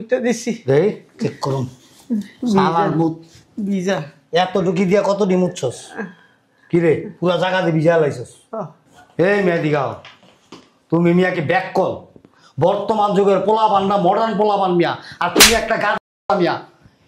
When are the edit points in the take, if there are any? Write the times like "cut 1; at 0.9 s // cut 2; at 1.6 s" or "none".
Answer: none